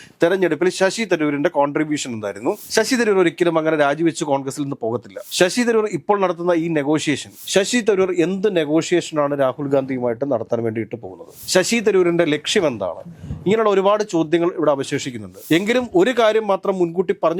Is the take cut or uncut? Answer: cut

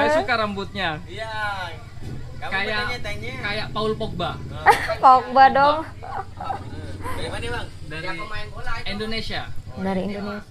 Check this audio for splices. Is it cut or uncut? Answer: uncut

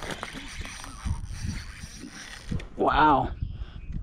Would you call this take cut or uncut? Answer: uncut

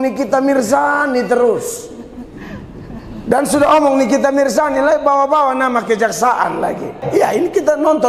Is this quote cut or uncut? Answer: cut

